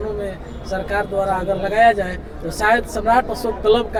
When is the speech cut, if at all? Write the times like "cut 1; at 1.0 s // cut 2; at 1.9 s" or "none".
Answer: none